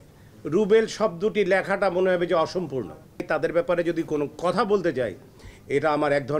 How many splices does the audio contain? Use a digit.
1